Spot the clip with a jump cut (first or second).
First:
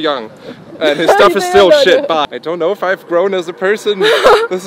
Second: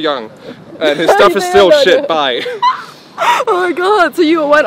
first